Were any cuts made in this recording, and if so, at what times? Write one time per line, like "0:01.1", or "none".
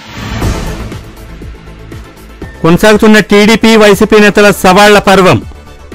0:02.6